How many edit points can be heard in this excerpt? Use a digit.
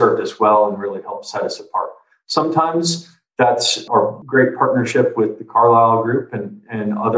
1